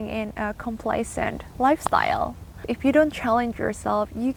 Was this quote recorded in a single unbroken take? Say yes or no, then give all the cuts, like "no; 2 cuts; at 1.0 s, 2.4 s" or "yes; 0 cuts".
yes; 0 cuts